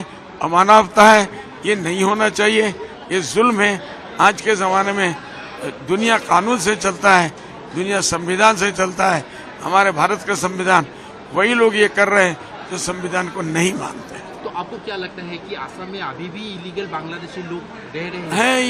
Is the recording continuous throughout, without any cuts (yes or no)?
yes